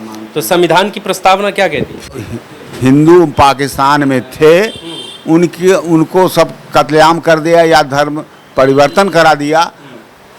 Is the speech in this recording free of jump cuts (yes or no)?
no